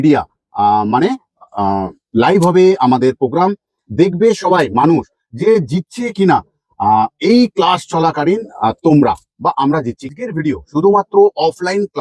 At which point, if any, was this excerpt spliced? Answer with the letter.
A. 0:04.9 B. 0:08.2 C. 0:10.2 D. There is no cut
C